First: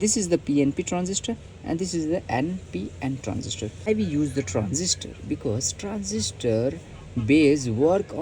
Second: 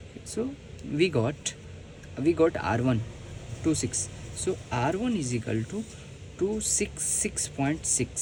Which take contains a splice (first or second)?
first